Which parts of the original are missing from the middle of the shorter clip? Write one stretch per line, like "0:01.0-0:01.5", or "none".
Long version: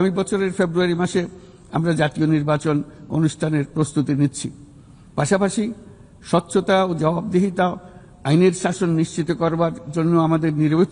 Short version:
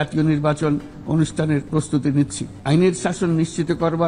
0:04.5-0:08.1